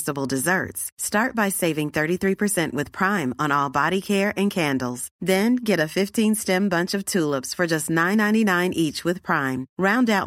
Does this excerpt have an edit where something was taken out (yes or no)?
no